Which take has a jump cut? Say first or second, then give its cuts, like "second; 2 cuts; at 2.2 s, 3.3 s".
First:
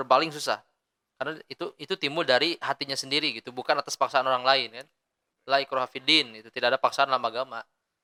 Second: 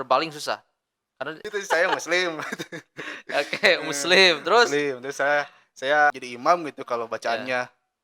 second; 2 cuts; at 1.3 s, 6.1 s